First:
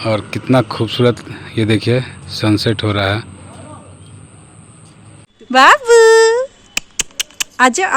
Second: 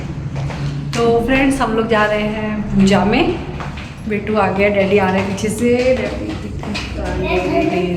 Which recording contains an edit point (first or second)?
first